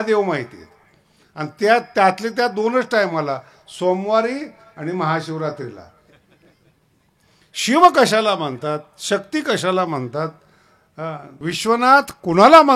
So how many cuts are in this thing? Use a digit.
1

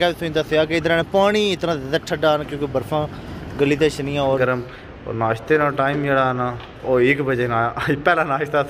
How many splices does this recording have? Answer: 1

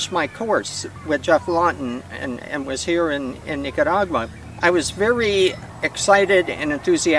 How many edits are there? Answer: 3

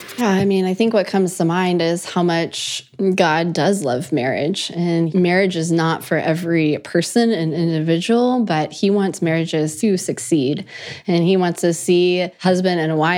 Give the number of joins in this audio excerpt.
3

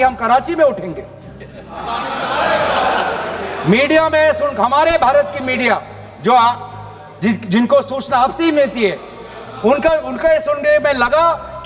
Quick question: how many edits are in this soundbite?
0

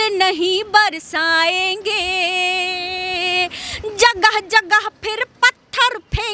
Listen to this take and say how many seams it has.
0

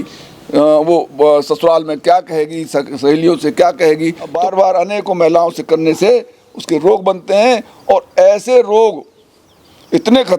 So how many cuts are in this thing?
1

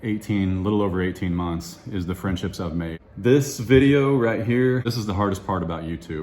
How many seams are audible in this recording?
2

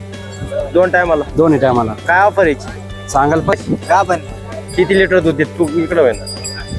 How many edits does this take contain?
1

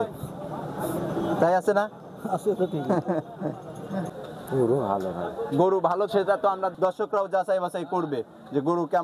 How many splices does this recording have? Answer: 2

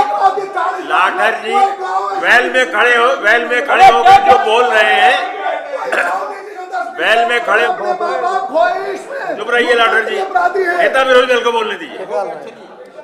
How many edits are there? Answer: 1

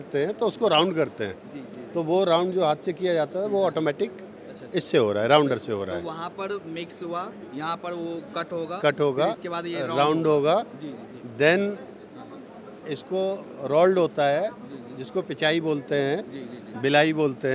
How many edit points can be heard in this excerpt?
0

